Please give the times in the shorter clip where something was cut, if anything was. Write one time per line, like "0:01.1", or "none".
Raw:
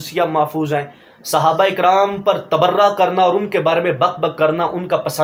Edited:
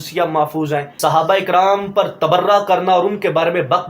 0:00.9